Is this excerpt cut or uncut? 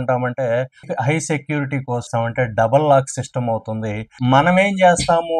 cut